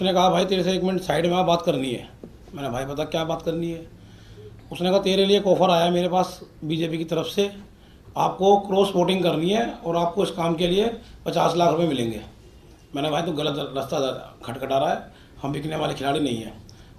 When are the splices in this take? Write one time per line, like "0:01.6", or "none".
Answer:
none